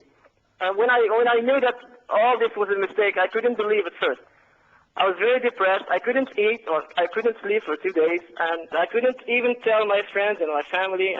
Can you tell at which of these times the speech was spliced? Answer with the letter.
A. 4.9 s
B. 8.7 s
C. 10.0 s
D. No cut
B